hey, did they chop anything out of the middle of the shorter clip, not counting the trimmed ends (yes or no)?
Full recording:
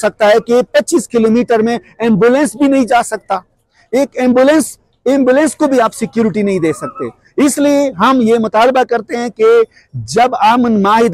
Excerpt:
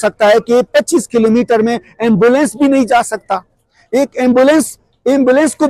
no